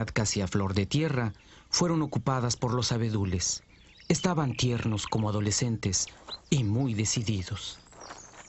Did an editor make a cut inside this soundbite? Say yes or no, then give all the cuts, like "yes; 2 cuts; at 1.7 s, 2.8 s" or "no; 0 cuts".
yes; 1 cut; at 6.9 s